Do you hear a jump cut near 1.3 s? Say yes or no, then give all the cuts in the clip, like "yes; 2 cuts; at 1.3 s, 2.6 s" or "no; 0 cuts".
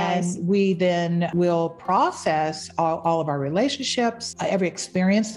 yes; 2 cuts; at 1.3 s, 4.3 s